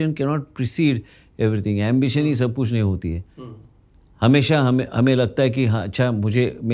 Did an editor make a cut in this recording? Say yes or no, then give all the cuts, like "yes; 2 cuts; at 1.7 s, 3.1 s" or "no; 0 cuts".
no; 0 cuts